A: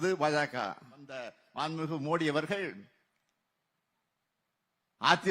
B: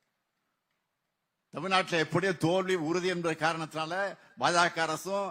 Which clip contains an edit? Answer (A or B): A